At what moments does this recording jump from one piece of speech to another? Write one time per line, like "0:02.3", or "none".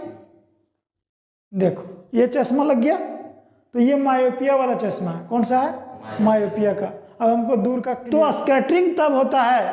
0:08.0